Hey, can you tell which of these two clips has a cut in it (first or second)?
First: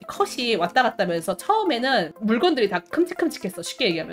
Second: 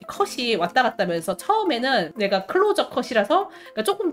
first